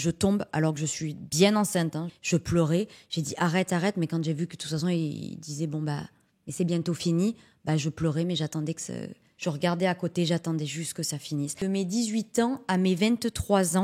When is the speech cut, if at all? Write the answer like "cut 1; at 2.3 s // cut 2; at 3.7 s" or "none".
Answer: cut 1; at 2.1 s // cut 2; at 9.3 s // cut 3; at 11.6 s